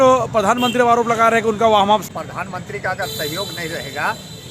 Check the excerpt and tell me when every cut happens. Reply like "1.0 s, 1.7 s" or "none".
2.1 s